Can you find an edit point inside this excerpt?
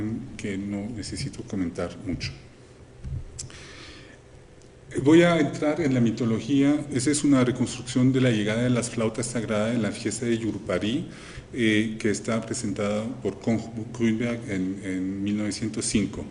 yes; 1 cut; at 12.7 s

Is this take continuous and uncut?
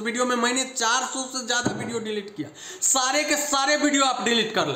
yes; 0 cuts

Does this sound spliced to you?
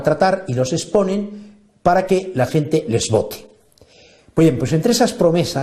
yes; 1 cut; at 4.1 s

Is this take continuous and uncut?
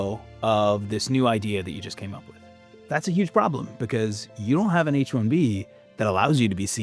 no; 1 cut; at 2.8 s

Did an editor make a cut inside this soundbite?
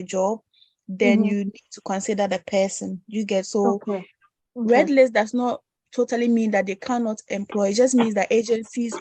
no; 0 cuts

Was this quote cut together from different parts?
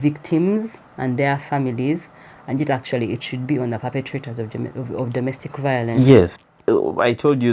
yes; 1 cut; at 6.4 s

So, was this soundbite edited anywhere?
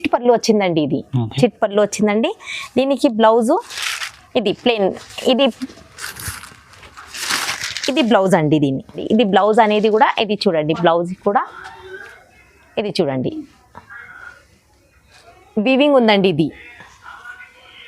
yes; 1 cut; at 9.0 s

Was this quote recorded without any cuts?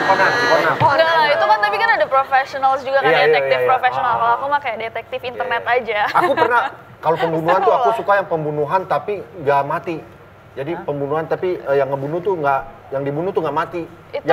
yes; 0 cuts

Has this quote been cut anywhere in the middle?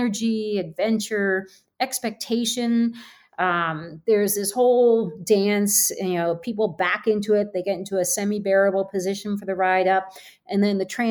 no; 0 cuts

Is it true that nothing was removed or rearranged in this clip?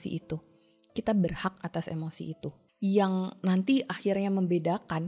no; 1 cut; at 2.7 s

